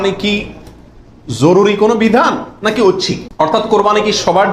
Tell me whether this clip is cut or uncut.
cut